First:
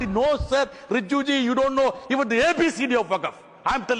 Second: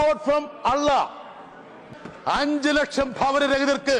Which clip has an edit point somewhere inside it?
second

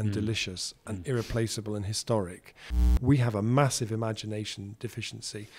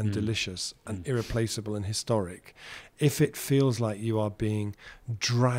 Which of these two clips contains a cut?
first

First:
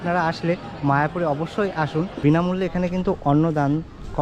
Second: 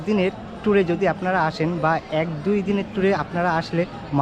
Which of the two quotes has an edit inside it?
first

